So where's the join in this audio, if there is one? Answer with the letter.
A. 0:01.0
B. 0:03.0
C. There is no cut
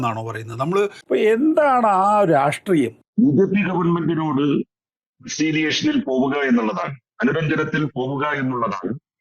A